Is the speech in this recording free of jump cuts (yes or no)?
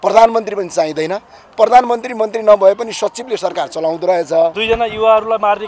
no